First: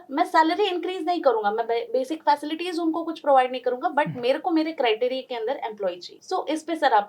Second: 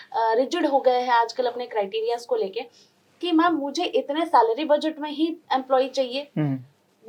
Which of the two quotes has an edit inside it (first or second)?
first